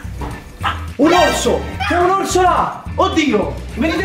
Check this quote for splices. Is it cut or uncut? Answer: uncut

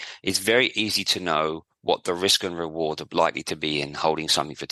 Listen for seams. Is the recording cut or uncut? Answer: uncut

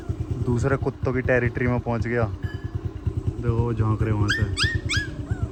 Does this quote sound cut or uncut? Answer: uncut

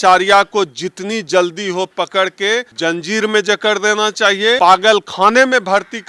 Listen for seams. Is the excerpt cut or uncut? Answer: cut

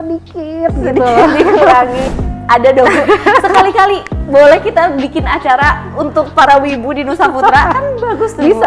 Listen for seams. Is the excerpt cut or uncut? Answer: cut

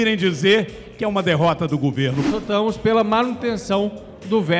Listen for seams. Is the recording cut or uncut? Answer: cut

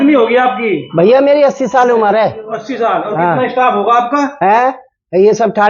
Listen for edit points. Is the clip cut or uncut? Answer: uncut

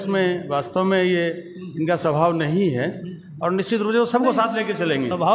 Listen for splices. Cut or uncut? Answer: uncut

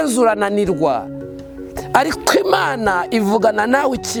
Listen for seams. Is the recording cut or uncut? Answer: uncut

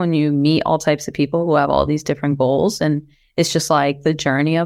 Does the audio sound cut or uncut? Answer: uncut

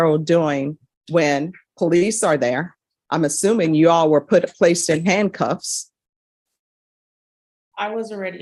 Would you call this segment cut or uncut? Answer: uncut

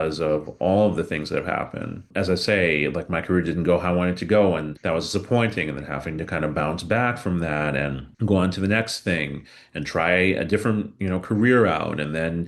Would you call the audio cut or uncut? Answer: cut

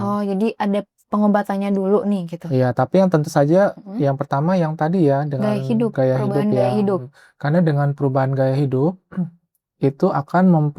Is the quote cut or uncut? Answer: uncut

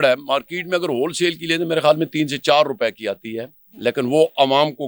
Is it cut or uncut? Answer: uncut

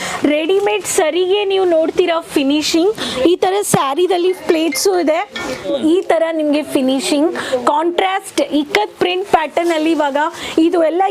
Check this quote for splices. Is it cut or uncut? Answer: cut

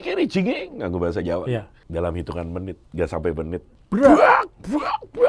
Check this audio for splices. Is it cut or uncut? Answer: cut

